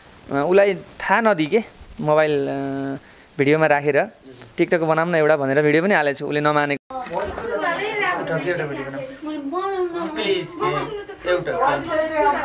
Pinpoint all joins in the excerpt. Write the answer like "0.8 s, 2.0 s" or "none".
6.8 s